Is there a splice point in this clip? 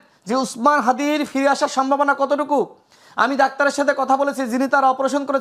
no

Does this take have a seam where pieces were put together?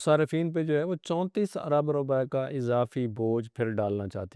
no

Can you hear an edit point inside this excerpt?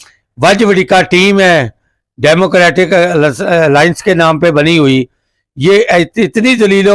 no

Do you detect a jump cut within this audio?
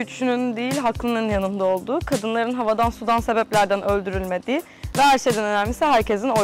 no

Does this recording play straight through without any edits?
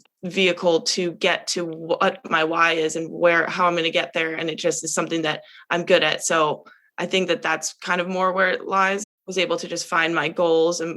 no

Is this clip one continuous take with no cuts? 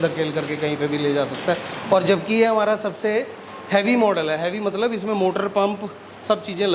yes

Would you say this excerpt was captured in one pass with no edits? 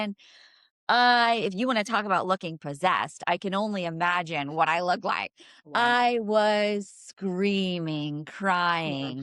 yes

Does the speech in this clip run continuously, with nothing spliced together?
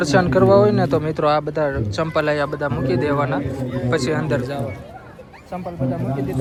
yes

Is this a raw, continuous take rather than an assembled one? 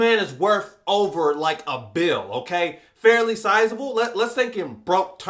yes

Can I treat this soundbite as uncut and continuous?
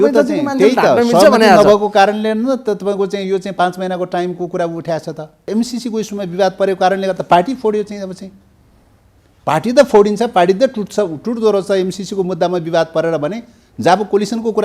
no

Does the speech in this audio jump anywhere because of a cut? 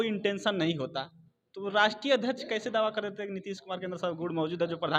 no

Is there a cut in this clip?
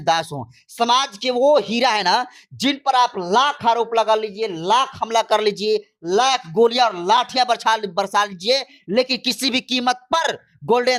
no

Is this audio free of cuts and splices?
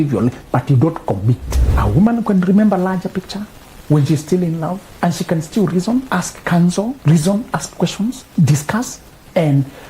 no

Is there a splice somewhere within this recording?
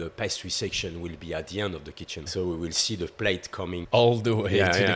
yes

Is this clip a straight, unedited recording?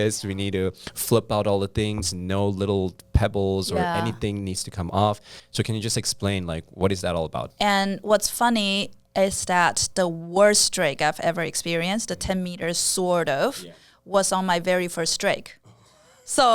no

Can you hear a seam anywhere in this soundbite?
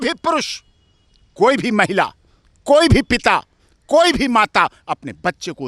no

